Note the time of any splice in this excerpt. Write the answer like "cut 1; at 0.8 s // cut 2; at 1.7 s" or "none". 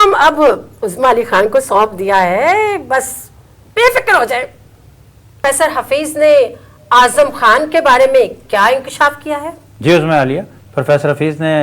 cut 1; at 5.4 s